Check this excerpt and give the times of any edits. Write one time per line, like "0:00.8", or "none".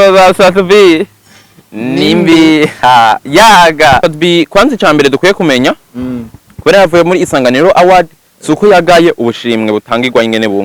0:04.0